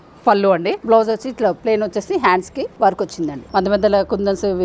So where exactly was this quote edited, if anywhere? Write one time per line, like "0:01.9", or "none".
0:00.8
0:01.6
0:02.7
0:03.4